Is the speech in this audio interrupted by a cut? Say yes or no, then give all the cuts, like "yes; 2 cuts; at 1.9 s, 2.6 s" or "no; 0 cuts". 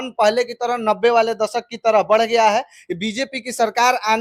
no; 0 cuts